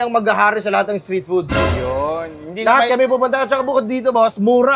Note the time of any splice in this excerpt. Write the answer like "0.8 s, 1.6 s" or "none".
none